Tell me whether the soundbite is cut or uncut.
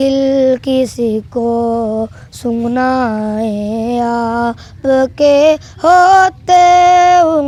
uncut